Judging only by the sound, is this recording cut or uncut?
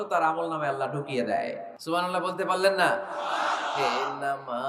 cut